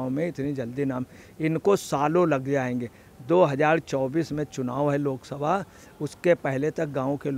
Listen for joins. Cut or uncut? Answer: uncut